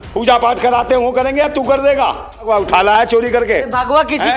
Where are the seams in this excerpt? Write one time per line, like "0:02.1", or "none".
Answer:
0:02.5